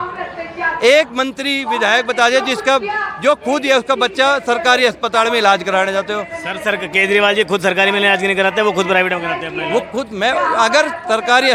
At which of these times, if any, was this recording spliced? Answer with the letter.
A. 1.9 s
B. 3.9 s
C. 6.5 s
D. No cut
D